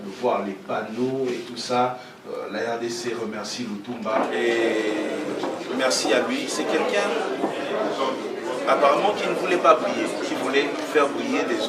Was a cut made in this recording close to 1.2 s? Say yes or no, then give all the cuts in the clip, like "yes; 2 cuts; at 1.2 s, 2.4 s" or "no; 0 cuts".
no; 1 cut; at 4.2 s